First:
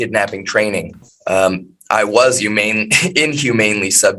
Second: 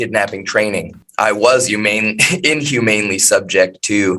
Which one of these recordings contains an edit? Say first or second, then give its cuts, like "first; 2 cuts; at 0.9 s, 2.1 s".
second; 1 cut; at 1.0 s